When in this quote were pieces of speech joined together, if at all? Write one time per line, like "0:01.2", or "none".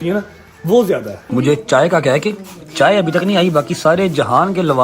0:01.2